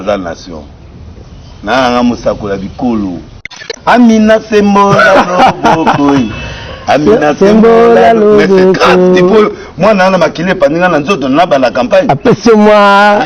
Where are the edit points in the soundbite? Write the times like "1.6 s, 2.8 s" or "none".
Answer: 3.7 s